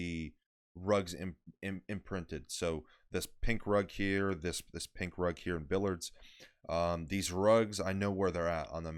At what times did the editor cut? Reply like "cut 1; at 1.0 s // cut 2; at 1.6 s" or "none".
none